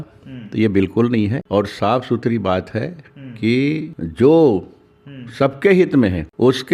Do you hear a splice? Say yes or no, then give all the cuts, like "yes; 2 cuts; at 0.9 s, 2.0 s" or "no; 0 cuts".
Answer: no; 0 cuts